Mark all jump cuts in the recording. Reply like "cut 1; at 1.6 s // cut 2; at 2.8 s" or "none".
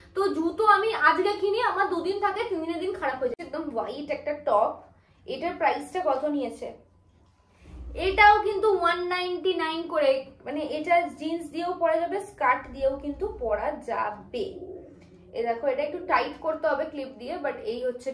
cut 1; at 3.3 s

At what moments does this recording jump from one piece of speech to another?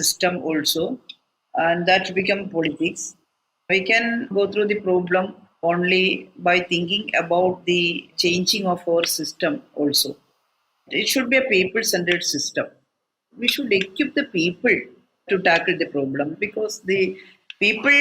cut 1; at 3.7 s

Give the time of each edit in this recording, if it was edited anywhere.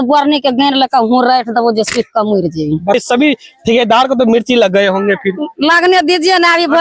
cut 1; at 3.0 s

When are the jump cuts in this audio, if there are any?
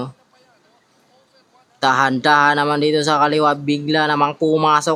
none

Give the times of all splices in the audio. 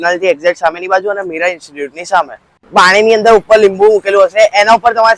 cut 1; at 2.6 s

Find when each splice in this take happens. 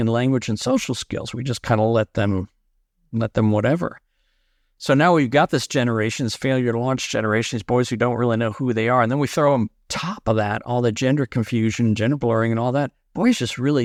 none

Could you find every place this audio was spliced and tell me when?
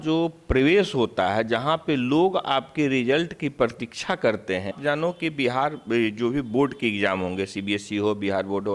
cut 1; at 4.8 s

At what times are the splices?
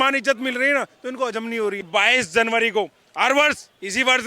cut 1; at 1.9 s

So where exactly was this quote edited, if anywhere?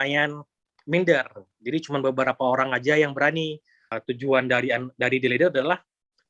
cut 1; at 3.9 s

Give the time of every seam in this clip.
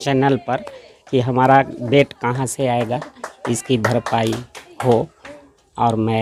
none

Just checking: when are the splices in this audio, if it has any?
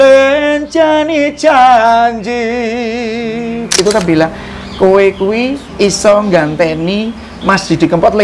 cut 1; at 3.8 s

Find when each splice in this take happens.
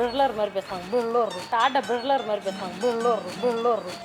none

